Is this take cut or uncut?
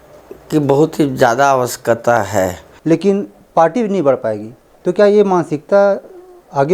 cut